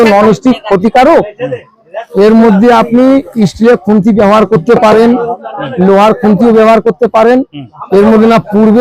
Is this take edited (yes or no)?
no